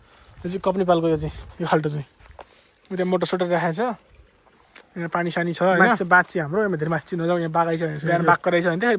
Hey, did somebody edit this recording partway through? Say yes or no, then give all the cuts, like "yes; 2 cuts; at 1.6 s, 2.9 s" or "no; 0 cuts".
yes; 2 cuts; at 6.0 s, 8.0 s